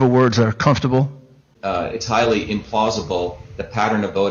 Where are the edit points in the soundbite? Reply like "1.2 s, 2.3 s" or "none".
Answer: 1.5 s